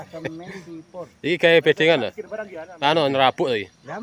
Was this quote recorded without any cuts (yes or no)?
yes